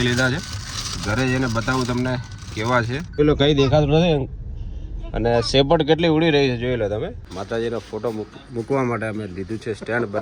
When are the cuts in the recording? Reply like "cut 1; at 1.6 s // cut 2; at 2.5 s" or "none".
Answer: cut 1; at 3.2 s // cut 2; at 7.3 s